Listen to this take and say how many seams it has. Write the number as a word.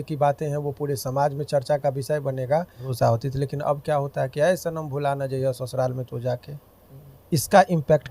one